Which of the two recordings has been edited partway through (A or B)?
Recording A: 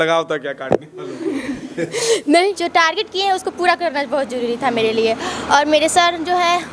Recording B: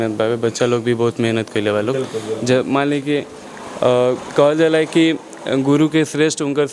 A